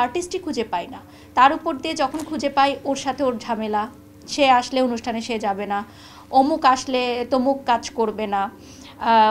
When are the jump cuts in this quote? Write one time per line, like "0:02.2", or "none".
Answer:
none